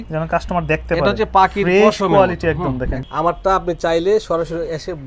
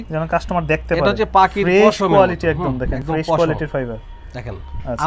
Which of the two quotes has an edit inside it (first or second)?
first